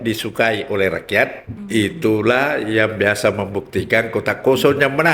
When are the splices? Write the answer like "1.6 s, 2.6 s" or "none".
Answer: 1.5 s